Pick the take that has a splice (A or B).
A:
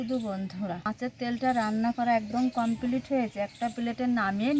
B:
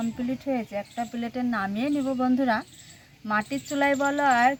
A